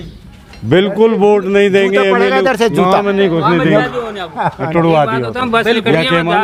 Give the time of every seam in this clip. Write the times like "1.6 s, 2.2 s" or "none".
none